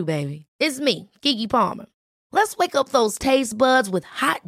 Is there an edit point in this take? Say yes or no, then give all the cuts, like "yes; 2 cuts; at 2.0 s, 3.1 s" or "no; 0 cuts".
no; 0 cuts